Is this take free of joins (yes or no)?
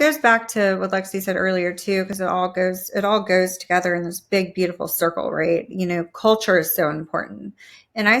yes